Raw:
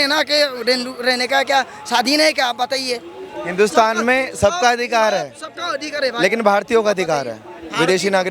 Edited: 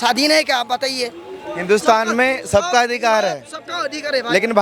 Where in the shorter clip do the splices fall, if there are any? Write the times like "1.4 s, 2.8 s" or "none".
none